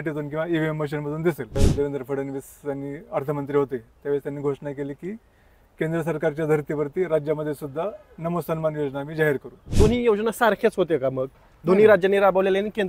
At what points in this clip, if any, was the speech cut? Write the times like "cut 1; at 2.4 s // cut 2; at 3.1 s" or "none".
cut 1; at 1.6 s // cut 2; at 9.7 s

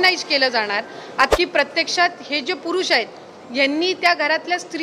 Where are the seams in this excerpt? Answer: cut 1; at 1.3 s

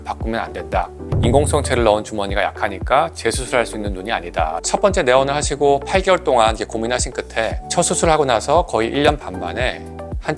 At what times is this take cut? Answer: cut 1; at 1.0 s // cut 2; at 4.6 s // cut 3; at 7.8 s

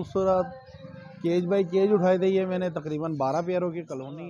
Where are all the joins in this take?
none

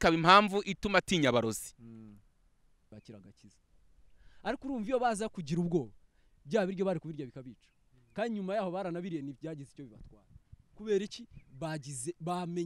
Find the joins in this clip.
cut 1; at 2.9 s

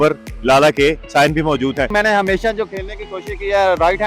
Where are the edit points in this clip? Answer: cut 1; at 1.9 s

